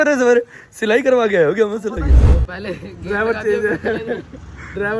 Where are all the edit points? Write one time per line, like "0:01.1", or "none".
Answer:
0:02.2